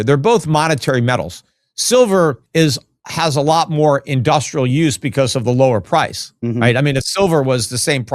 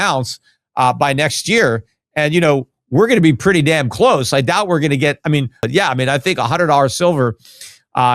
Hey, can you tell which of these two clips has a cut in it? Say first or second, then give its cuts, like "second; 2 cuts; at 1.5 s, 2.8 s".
first; 1 cut; at 2.4 s